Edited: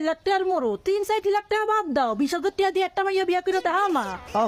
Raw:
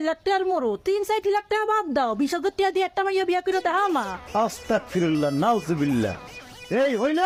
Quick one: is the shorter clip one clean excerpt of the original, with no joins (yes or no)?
yes